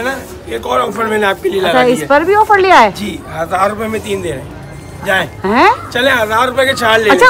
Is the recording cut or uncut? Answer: uncut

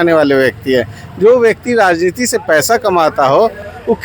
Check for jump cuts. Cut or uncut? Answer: uncut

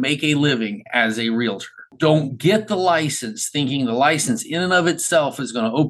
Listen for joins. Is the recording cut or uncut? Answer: cut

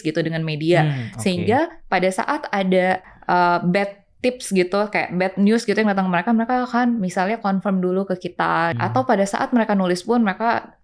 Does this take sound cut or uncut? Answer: cut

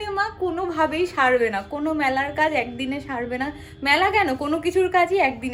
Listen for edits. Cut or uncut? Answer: uncut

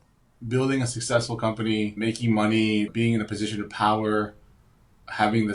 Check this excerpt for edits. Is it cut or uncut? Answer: uncut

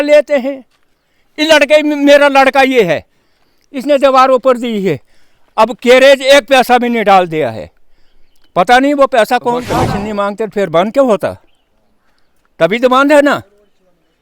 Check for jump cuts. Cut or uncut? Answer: cut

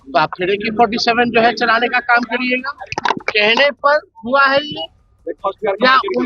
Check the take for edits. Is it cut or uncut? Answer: cut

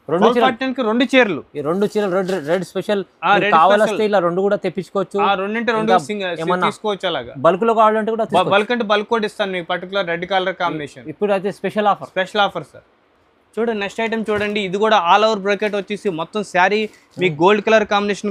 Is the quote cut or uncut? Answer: uncut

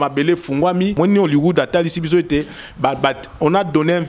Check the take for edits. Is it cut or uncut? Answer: cut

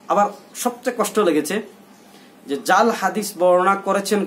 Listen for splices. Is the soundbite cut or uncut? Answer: uncut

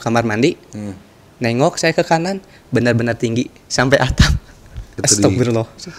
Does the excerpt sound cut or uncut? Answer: cut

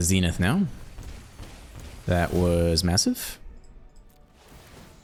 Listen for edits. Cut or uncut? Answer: uncut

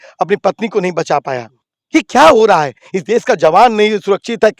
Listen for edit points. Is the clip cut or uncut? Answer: uncut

